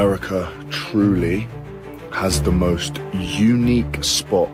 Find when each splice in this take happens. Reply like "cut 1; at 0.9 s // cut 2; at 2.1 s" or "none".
none